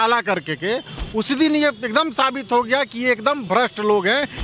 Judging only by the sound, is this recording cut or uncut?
uncut